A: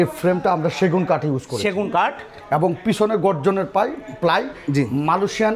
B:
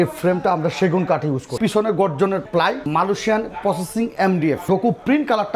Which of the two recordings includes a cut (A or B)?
B